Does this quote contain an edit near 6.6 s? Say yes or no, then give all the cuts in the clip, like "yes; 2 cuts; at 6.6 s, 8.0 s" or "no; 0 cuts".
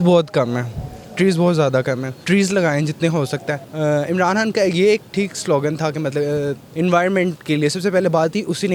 yes; 3 cuts; at 2.1 s, 3.6 s, 6.6 s